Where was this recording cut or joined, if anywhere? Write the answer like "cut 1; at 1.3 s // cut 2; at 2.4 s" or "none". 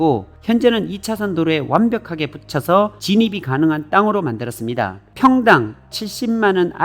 cut 1; at 5.0 s